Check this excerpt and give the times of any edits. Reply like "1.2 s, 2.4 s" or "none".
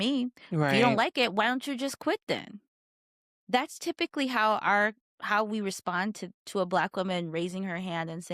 none